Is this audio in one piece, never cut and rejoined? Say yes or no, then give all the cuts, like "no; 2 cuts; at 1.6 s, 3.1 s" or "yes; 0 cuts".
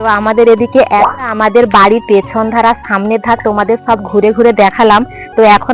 no; 1 cut; at 1.1 s